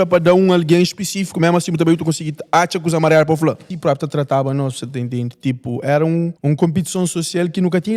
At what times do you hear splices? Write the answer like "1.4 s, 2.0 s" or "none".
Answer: 3.7 s, 6.3 s